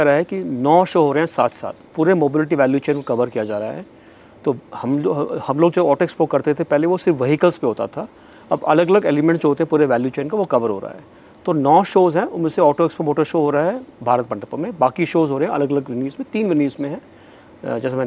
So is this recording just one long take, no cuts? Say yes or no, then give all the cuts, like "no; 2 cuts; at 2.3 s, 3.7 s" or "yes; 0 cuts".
yes; 0 cuts